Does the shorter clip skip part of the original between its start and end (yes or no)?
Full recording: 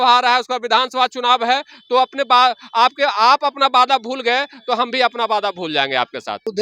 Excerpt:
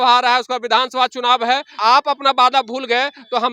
yes